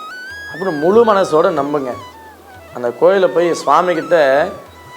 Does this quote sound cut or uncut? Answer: uncut